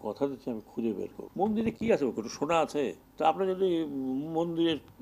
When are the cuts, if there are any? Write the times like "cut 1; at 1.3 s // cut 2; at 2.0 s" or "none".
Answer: cut 1; at 1.2 s // cut 2; at 3.0 s